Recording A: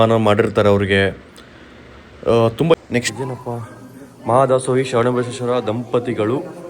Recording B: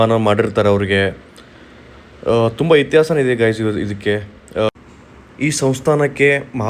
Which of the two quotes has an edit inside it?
A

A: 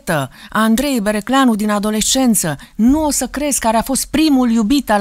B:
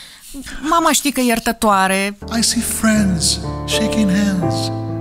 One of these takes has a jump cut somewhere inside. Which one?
B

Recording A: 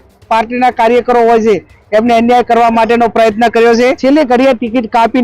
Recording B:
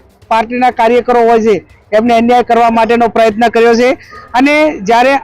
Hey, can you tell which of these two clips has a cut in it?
A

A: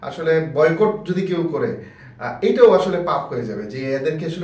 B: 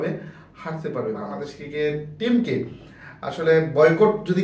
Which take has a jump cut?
B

